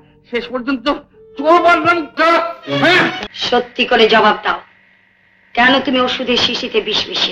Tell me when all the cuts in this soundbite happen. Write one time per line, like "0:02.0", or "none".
0:03.2